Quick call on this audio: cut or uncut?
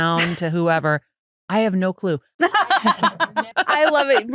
cut